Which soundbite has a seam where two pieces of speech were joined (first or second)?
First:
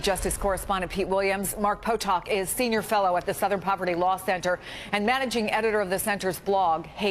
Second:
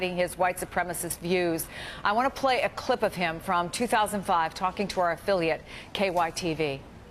first